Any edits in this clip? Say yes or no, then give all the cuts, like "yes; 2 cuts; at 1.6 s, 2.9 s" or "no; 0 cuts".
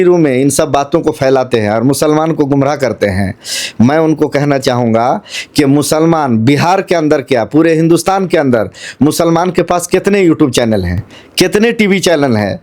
no; 0 cuts